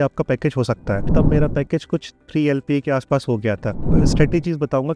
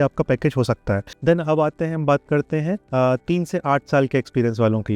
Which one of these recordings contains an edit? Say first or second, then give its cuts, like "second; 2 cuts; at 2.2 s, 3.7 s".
first; 2 cuts; at 1.1 s, 3.8 s